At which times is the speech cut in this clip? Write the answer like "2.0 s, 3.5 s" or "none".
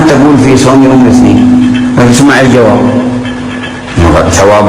none